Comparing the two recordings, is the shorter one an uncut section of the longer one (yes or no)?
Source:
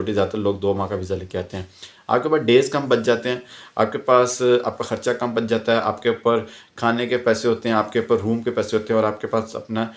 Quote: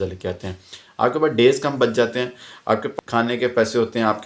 no